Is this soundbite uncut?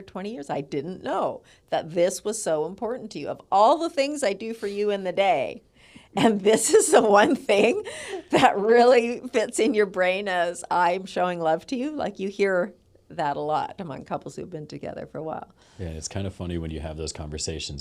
yes; 0 cuts

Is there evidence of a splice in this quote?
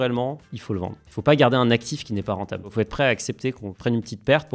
yes; 2 cuts; at 2.7 s, 3.7 s

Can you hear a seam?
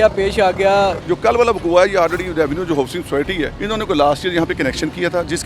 yes; 2 cuts; at 1.0 s, 3.6 s

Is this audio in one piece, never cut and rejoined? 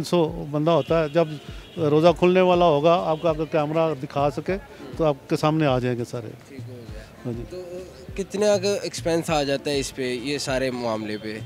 yes; 0 cuts

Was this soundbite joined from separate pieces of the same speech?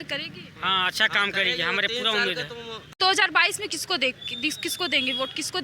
yes; 1 cut; at 2.9 s

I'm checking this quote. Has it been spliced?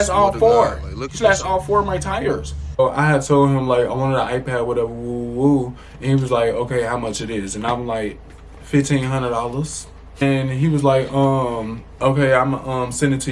yes; 2 cuts; at 2.8 s, 10.2 s

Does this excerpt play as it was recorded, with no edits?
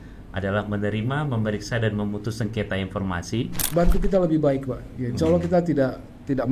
no; 1 cut; at 3.6 s

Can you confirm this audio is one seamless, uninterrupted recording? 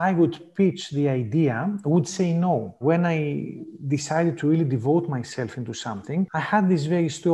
no; 2 cuts; at 2.8 s, 6.3 s

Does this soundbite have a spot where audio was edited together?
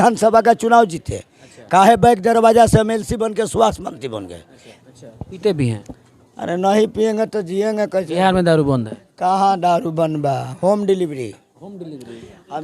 yes; 1 cut; at 4.7 s

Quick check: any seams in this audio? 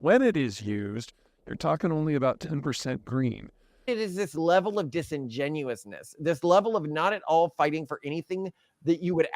yes; 1 cut; at 3.9 s

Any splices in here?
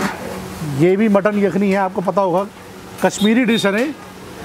no; 0 cuts

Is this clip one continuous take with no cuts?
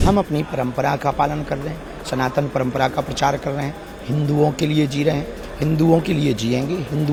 yes; 0 cuts

